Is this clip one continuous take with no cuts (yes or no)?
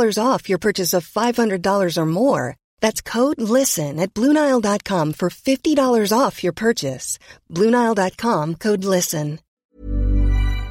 no